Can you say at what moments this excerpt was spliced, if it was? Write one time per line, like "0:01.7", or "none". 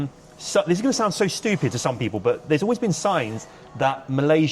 none